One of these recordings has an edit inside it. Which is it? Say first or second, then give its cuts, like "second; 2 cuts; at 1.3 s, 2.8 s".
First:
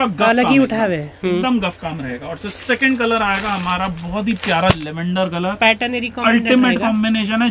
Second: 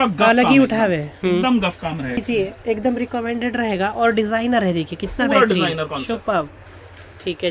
second; 1 cut; at 2.2 s